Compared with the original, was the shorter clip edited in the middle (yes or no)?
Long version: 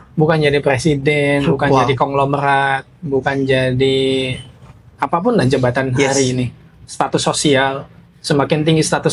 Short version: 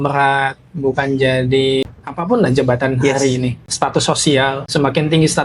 yes